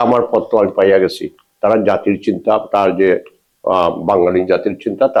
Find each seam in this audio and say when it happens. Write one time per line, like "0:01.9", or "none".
none